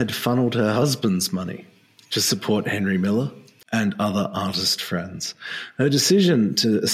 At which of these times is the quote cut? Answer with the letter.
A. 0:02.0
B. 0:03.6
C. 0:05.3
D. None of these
B